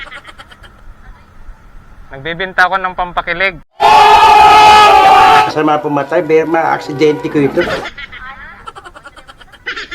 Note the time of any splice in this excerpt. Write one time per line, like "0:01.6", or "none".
0:08.6